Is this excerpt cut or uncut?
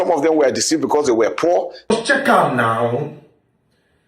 cut